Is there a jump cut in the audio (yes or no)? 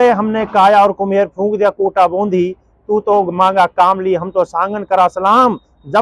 no